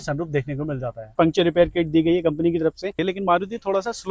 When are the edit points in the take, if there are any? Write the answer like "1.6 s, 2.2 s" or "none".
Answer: 1.1 s, 3.0 s

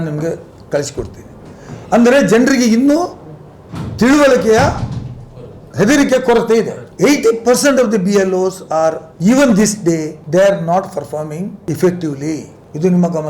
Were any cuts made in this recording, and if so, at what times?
6.8 s

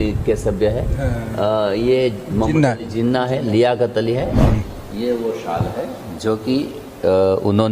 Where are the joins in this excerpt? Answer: 4.4 s

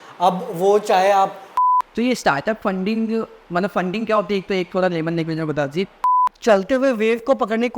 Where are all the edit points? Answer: 1.5 s, 6.0 s

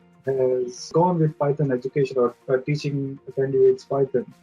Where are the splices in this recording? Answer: 0.9 s

